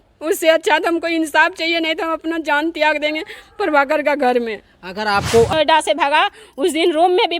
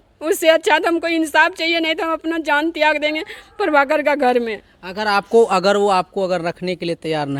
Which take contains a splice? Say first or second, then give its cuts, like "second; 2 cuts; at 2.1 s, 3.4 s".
first; 1 cut; at 5.5 s